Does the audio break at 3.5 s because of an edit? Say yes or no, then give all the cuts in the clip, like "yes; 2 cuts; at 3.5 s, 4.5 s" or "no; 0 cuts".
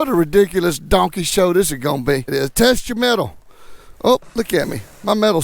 no; 1 cut; at 2.3 s